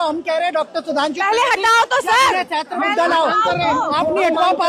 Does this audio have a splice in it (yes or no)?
no